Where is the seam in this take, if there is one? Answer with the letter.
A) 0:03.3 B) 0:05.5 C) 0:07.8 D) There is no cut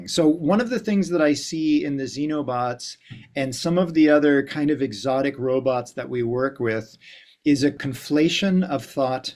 C